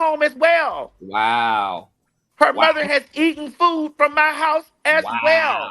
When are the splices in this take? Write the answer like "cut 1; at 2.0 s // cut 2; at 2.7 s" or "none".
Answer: none